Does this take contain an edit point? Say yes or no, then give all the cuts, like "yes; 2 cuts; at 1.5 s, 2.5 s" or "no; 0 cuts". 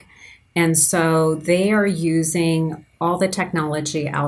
no; 0 cuts